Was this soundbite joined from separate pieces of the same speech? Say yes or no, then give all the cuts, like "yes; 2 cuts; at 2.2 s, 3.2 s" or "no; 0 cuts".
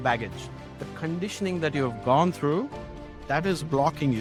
no; 0 cuts